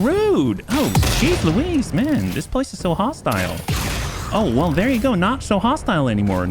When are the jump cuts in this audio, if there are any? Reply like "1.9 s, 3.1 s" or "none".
none